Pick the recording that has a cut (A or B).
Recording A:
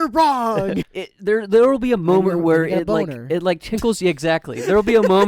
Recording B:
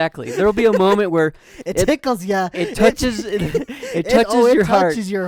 A